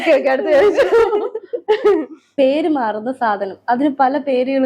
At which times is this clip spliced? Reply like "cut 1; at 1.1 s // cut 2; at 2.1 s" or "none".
cut 1; at 2.2 s